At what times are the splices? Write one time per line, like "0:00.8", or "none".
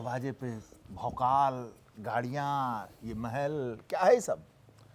none